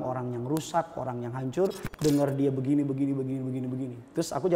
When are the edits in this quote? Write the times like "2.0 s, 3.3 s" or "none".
1.9 s

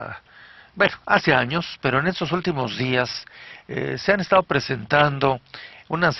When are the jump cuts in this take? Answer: none

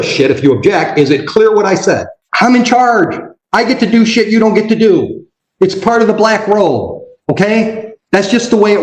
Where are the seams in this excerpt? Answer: 2.2 s

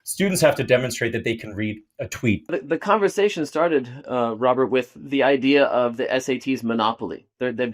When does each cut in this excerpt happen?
2.5 s

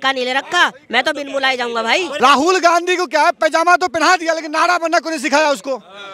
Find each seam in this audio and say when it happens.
2.1 s

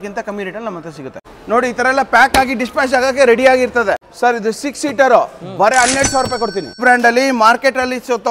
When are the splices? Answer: 1.3 s, 4.1 s, 6.8 s

